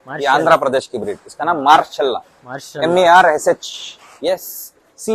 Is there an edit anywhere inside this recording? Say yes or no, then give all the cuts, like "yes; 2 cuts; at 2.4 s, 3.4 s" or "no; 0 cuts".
no; 0 cuts